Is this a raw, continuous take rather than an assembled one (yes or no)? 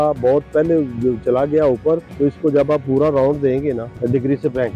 no